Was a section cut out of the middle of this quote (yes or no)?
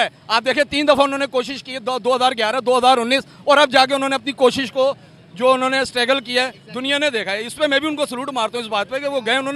no